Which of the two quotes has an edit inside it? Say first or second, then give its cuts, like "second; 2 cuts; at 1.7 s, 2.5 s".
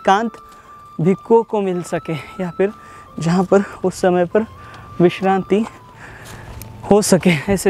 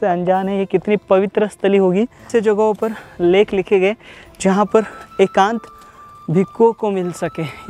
second; 1 cut; at 2.3 s